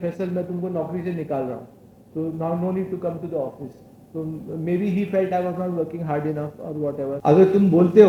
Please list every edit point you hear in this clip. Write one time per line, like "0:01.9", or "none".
0:07.1